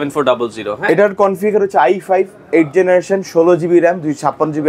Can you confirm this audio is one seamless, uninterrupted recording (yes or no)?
yes